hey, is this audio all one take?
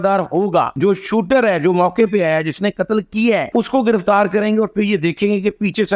yes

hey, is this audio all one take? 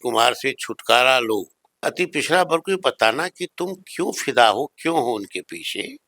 no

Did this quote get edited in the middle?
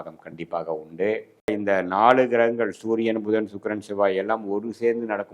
yes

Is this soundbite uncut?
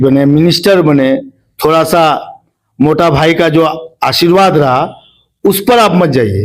yes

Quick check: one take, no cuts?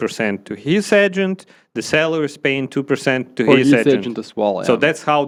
yes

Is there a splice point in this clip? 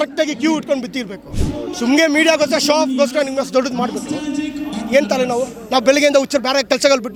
no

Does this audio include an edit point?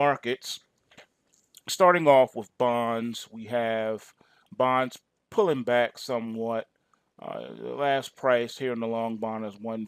yes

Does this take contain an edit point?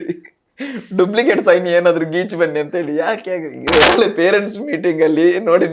yes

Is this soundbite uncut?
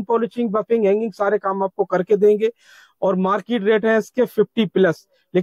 yes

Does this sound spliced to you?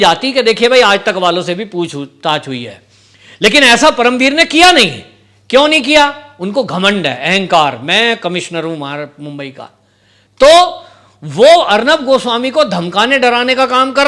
no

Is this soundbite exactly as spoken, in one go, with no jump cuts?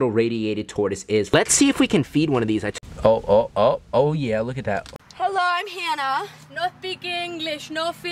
no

